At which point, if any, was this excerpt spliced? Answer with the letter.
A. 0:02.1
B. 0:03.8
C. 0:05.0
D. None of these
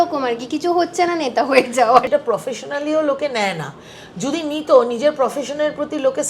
A